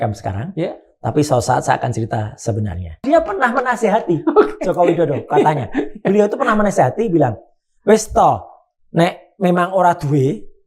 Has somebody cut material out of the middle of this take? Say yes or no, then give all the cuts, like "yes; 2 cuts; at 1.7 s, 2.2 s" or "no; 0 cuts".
yes; 1 cut; at 3.0 s